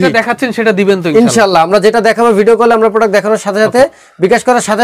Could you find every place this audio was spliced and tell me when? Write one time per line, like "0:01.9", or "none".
none